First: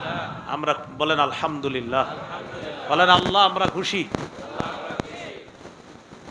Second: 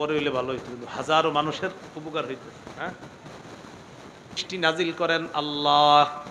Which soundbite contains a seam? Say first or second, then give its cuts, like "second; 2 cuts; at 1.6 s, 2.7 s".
second; 1 cut; at 4.5 s